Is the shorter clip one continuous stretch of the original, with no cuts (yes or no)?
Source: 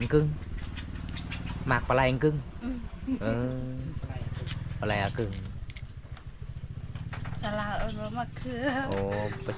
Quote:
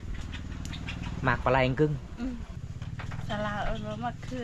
no